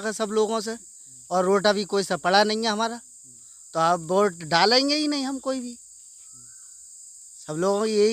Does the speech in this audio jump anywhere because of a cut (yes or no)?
no